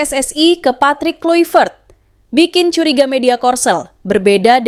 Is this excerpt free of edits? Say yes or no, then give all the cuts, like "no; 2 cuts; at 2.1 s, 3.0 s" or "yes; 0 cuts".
yes; 0 cuts